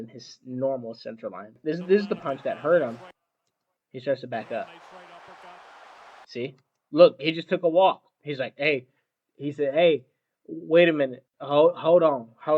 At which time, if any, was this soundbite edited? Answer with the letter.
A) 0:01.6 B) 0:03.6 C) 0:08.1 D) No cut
A